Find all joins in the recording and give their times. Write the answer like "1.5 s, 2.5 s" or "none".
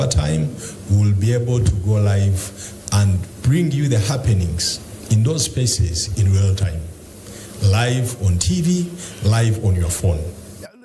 none